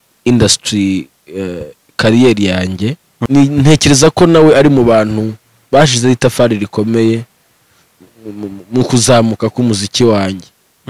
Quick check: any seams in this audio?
yes; 1 cut; at 3.1 s

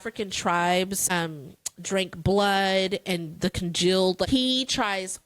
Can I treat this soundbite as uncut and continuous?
no; 2 cuts; at 1.0 s, 4.3 s

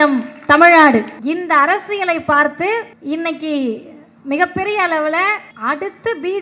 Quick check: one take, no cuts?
no; 3 cuts; at 1.1 s, 2.9 s, 5.5 s

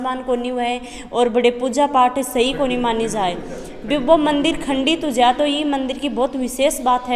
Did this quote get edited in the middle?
no; 0 cuts

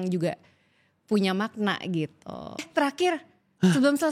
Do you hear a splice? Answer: yes; 1 cut; at 2.5 s

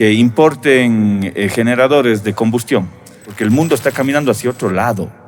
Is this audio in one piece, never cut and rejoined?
no; 1 cut; at 3.3 s

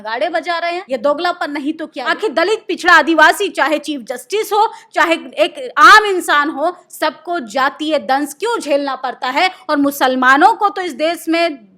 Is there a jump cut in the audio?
yes; 2 cuts; at 0.8 s, 1.9 s

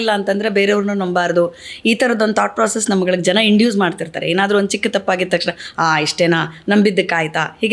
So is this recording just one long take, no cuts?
yes; 0 cuts

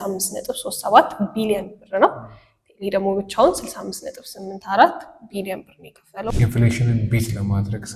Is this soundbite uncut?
no; 1 cut; at 6.3 s

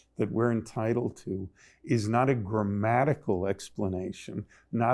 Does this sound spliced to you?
no; 0 cuts

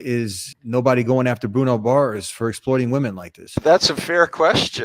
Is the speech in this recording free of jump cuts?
no; 1 cut; at 3.6 s

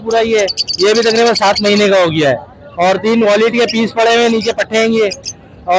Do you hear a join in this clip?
no; 0 cuts

